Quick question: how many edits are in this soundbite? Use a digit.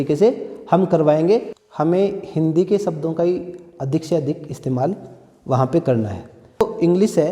2